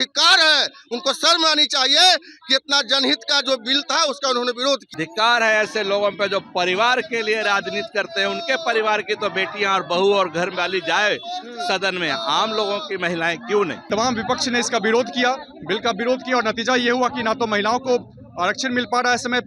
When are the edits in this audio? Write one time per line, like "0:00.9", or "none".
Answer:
0:04.9
0:13.8